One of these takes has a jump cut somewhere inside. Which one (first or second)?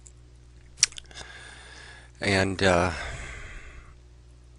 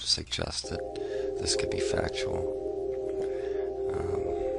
first